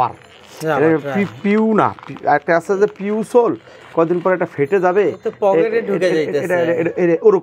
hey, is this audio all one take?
yes; 0 cuts

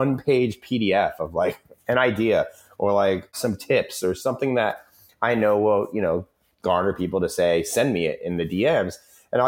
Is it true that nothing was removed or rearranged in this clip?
yes; 0 cuts

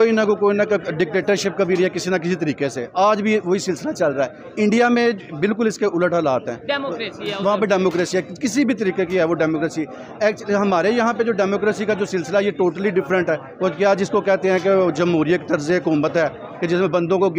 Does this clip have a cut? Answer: no; 0 cuts

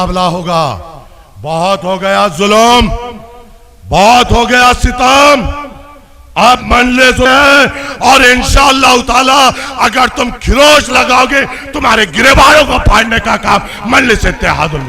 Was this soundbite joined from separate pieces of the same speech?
no; 0 cuts

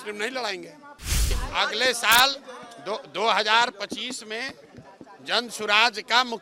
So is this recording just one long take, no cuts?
no; 1 cut; at 1.4 s

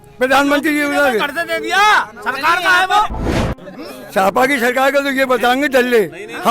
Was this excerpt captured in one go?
no; 1 cut; at 3.3 s

